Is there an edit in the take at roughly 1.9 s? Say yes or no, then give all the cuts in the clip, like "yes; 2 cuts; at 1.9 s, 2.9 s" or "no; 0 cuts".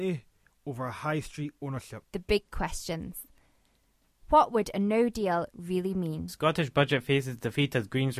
yes; 2 cuts; at 1.9 s, 6.3 s